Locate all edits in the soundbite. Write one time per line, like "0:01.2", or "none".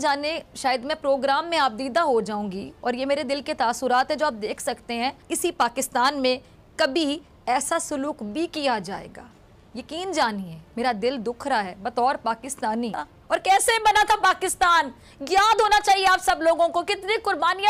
0:05.2
0:13.1